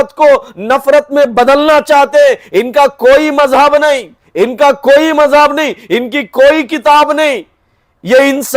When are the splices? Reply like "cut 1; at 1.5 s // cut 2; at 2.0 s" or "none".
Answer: none